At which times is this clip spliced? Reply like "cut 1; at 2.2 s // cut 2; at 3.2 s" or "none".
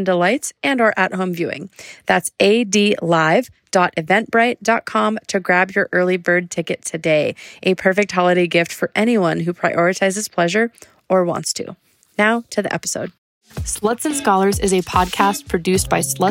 cut 1; at 13.1 s